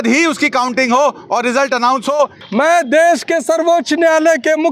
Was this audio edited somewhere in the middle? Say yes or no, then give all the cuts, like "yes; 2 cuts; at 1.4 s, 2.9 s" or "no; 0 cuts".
yes; 1 cut; at 2.4 s